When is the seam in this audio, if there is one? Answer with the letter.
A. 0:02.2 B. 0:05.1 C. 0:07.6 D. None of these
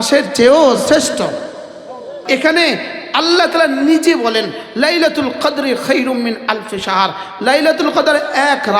A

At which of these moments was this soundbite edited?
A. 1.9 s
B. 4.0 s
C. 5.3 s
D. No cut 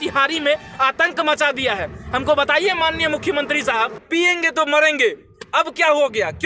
B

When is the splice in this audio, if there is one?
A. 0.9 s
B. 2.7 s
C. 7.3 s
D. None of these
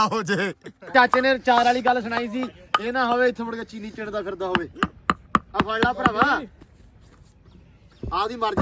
A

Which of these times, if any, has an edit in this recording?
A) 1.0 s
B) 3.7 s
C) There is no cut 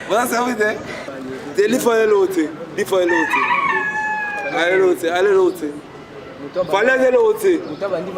A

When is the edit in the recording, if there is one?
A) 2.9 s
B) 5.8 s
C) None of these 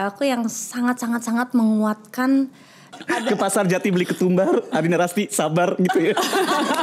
A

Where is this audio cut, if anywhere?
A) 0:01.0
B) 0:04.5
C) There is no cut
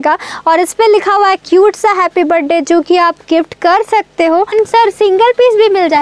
B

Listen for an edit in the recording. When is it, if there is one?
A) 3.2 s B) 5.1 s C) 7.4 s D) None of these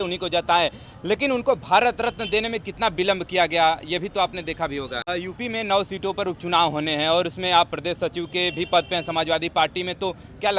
B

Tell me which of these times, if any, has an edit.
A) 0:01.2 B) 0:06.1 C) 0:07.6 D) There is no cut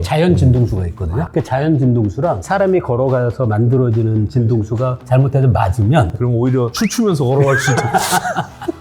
B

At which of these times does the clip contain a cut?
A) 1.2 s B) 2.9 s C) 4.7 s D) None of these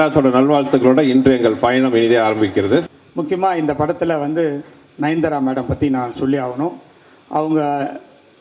B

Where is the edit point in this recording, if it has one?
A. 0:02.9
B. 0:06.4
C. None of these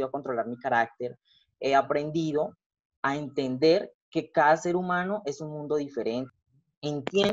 B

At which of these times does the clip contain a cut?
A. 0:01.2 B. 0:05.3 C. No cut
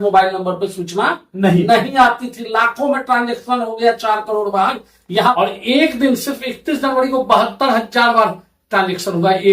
B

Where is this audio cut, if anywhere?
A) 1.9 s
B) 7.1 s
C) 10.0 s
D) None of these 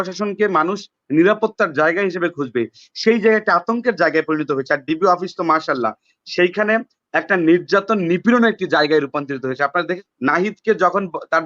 C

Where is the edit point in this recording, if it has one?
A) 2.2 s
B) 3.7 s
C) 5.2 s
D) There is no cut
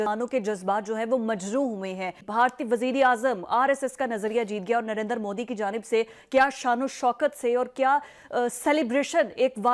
A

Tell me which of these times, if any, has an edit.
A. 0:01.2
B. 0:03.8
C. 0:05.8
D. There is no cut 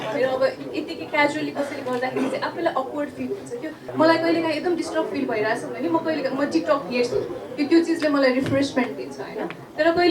B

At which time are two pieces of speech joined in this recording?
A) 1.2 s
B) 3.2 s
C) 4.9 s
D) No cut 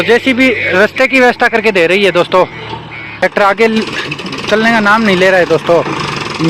B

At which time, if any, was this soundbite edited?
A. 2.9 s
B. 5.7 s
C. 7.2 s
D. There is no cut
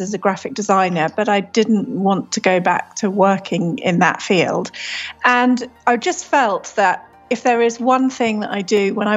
B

